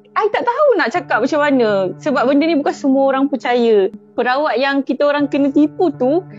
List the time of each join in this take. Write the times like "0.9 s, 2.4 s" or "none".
3.9 s